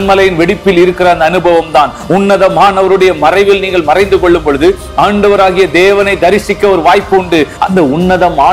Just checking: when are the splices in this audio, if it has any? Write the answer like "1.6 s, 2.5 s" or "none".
7.5 s